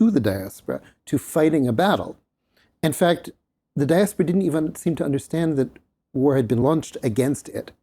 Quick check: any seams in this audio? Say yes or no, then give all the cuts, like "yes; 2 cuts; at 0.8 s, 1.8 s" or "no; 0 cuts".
yes; 1 cut; at 6.6 s